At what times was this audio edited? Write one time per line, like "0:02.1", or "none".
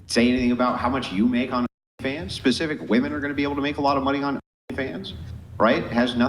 0:04.9